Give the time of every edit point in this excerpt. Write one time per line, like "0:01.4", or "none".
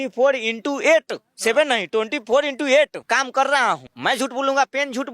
0:03.0
0:03.9